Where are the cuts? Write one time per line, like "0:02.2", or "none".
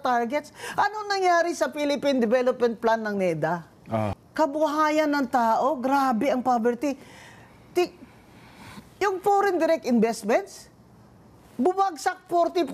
0:04.1